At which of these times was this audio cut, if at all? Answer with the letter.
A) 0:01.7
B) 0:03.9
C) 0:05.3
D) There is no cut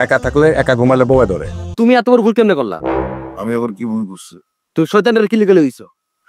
A